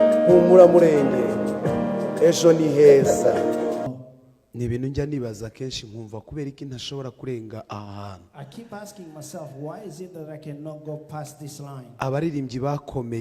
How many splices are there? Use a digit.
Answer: 1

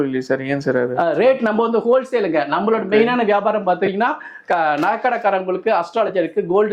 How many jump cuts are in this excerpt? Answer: 0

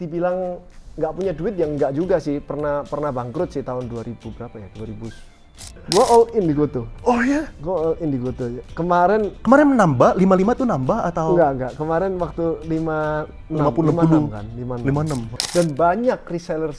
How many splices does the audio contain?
2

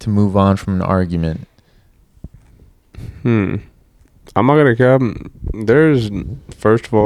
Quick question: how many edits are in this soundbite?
0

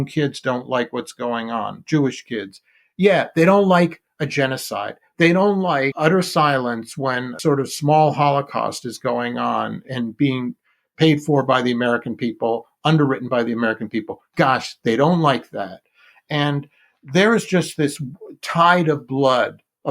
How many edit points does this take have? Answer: 3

